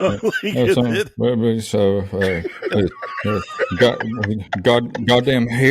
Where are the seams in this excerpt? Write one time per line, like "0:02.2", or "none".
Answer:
none